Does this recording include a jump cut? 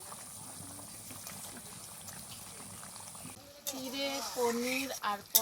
yes; 1 cut; at 3.3 s

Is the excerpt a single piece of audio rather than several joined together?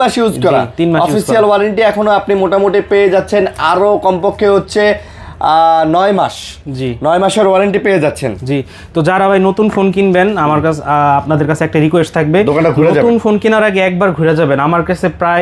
yes; 0 cuts

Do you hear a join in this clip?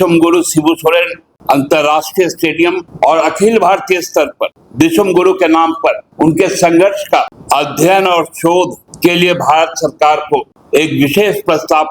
yes; 7 cuts; at 1.2 s, 2.9 s, 4.6 s, 6.1 s, 7.4 s, 8.8 s, 10.6 s

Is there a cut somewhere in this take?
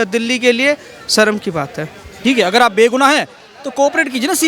yes; 1 cut; at 2.1 s

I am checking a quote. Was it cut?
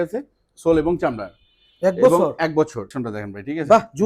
yes; 1 cut; at 2.9 s

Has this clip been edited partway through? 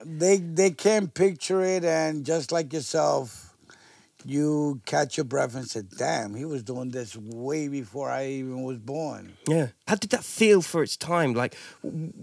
yes; 1 cut; at 9.8 s

